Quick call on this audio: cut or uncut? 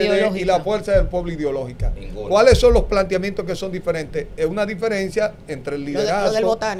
uncut